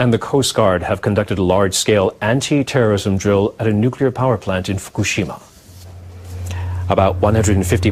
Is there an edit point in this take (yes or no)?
no